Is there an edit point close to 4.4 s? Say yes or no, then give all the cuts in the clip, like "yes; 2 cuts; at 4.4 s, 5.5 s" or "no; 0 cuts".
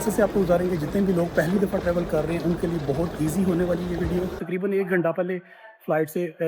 yes; 1 cut; at 4.4 s